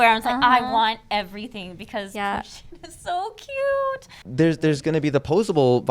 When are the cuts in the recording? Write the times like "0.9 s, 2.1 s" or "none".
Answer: 4.2 s